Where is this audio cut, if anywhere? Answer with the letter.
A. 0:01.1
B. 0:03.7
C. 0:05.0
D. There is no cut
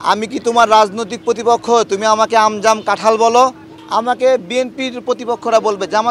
B